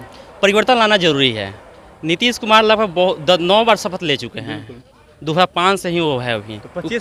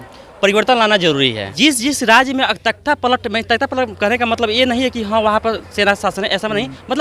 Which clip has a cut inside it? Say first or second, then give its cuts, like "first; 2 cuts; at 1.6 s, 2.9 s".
second; 1 cut; at 1.5 s